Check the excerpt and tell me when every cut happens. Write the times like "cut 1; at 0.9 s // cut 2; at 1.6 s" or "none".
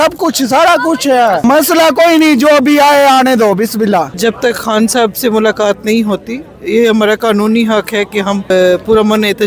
cut 1; at 1.4 s // cut 2; at 4.1 s // cut 3; at 8.5 s